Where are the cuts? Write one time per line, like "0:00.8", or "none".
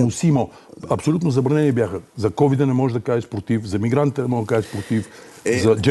none